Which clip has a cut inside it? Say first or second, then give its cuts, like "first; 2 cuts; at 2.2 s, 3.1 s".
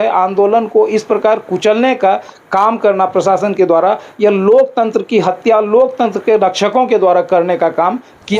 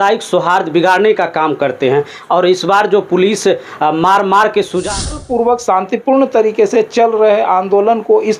second; 1 cut; at 5.2 s